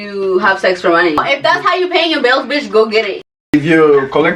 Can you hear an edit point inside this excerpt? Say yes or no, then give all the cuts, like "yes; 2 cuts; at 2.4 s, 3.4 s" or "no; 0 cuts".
yes; 2 cuts; at 1.2 s, 3.4 s